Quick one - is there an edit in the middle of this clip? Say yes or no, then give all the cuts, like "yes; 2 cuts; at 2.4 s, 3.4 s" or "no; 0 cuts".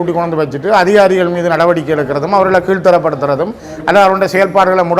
no; 0 cuts